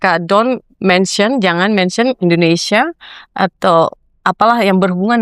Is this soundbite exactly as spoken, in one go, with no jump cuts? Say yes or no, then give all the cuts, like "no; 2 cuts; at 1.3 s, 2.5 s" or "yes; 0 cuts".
yes; 0 cuts